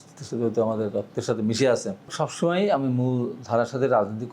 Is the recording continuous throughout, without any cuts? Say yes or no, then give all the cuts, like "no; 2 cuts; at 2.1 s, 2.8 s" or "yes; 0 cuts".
no; 1 cut; at 2.1 s